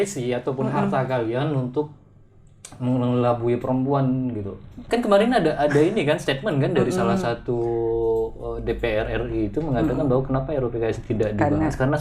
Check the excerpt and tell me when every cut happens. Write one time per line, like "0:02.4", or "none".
0:04.9